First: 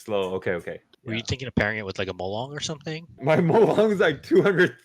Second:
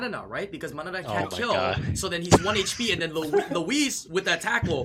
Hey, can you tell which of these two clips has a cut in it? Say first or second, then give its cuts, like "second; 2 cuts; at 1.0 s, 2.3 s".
first; 2 cuts; at 0.9 s, 3.2 s